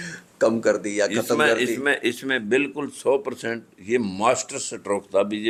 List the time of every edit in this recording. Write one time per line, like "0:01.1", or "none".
none